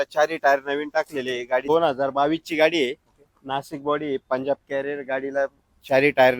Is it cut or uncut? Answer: cut